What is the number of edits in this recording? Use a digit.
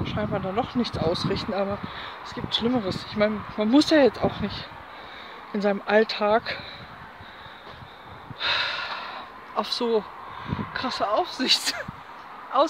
0